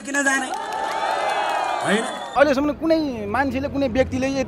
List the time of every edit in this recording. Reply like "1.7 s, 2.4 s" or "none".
2.2 s